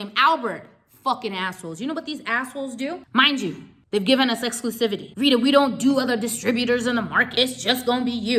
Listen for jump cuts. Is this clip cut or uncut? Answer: uncut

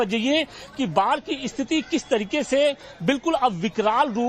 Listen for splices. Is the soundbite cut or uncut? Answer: uncut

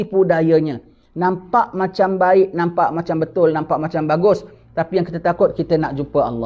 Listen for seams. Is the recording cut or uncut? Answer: uncut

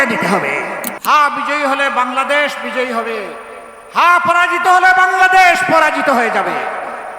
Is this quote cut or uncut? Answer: cut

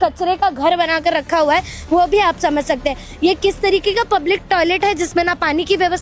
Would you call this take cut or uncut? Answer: uncut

